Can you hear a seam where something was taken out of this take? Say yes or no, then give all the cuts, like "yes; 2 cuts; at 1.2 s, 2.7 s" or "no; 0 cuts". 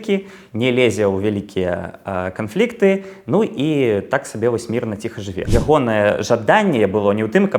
yes; 1 cut; at 5.4 s